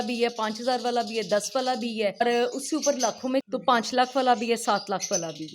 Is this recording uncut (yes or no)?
no